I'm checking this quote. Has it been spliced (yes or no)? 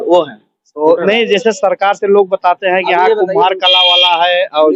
no